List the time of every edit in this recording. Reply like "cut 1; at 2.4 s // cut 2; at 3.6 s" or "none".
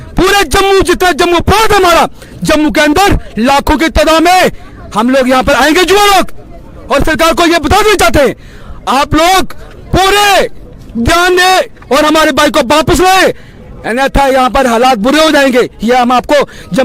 none